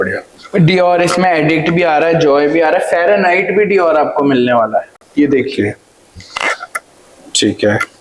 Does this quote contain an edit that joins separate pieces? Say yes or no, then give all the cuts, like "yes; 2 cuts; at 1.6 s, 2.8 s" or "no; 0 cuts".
no; 0 cuts